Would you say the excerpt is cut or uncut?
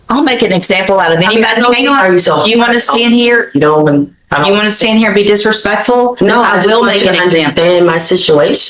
uncut